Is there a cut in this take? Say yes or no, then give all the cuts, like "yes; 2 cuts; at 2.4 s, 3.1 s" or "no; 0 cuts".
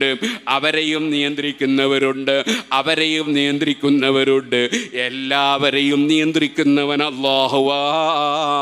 no; 0 cuts